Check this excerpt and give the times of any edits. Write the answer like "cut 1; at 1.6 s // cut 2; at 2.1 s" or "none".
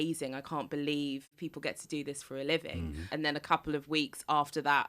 cut 1; at 1.4 s // cut 2; at 3.1 s